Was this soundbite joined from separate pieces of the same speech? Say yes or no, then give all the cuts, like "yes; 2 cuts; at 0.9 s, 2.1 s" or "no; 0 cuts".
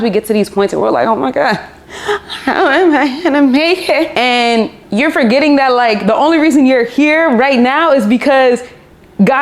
no; 0 cuts